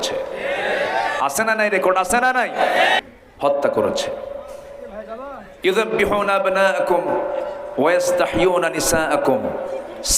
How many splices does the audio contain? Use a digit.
1